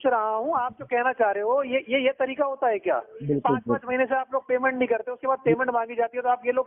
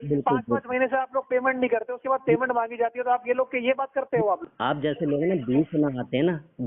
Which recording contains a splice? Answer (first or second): second